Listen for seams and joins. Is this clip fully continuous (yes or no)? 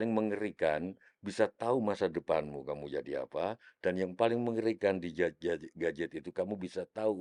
yes